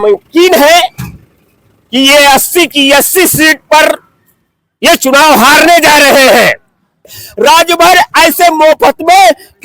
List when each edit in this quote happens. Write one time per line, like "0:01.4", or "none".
0:07.2